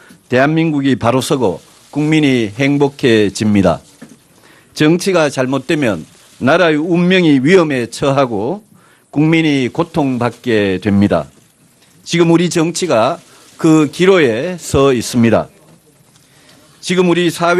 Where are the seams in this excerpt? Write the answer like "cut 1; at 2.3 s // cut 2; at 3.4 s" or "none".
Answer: cut 1; at 7.3 s